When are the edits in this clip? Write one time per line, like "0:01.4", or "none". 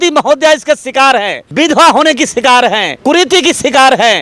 0:01.4
0:02.9

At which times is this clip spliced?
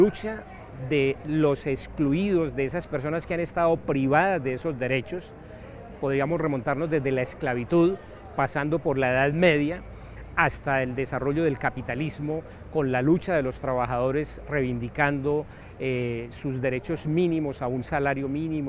none

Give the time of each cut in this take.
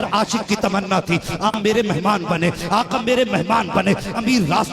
0:01.6

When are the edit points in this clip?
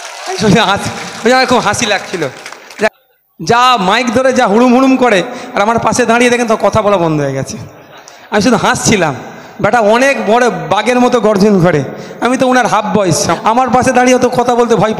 0:02.9
0:13.3

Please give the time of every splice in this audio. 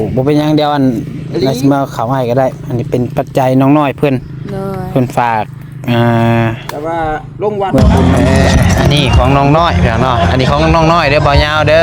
0:07.8

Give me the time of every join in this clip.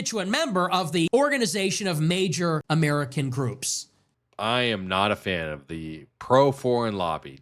0:01.1
0:02.6
0:03.8

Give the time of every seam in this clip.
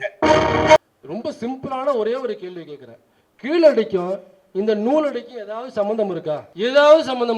0:00.8
0:06.5

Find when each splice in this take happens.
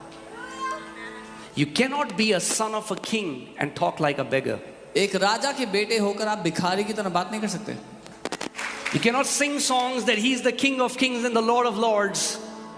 0:01.4
0:08.6

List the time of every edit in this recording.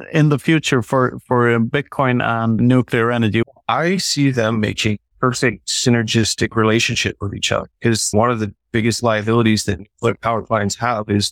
0:02.6
0:03.4
0:05.5
0:08.1

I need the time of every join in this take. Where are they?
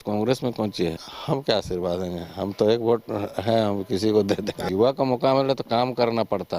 0:01.1
0:04.6

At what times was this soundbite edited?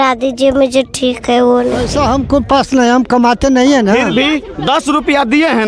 0:01.9

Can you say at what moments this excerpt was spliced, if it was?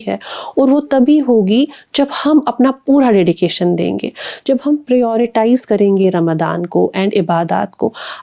none

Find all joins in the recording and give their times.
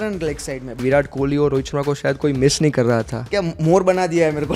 0:00.8
0:03.3

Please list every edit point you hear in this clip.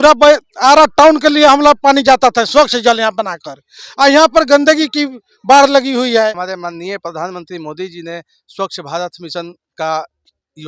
0:06.3

